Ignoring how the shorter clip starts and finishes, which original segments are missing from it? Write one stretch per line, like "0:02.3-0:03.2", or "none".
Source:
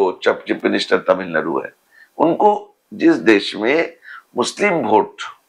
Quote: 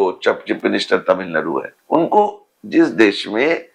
0:01.7-0:02.0